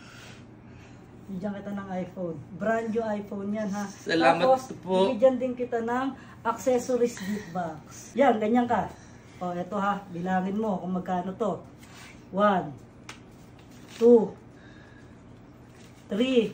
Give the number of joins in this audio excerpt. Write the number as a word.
one